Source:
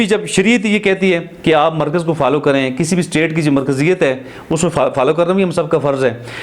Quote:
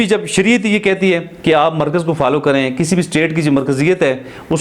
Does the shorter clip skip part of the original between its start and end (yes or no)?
no